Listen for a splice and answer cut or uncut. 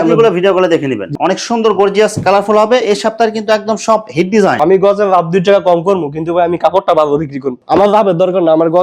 cut